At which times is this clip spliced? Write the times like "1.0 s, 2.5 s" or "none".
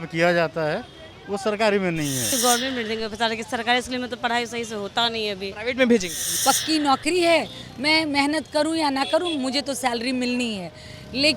2.3 s, 6.2 s